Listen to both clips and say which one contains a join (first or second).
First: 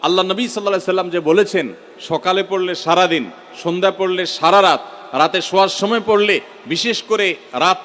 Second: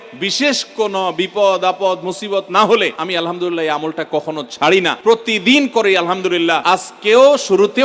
second